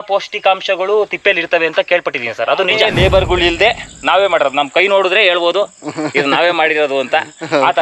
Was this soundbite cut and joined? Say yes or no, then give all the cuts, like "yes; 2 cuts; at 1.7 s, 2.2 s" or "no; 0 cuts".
yes; 1 cut; at 2.9 s